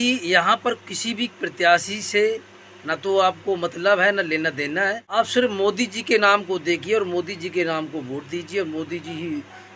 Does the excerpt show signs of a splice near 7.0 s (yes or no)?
no